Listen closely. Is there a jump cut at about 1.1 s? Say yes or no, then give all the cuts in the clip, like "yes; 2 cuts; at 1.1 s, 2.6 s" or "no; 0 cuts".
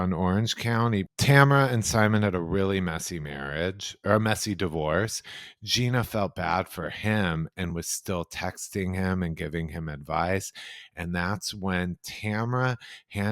yes; 1 cut; at 1.1 s